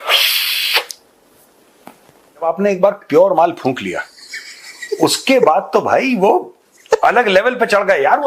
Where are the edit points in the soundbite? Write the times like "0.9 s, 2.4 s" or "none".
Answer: 2.4 s